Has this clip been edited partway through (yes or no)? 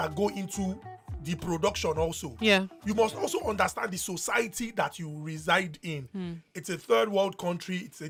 no